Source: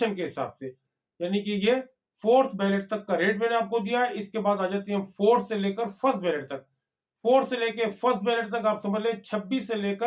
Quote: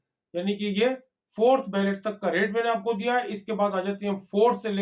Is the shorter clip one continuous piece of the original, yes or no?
yes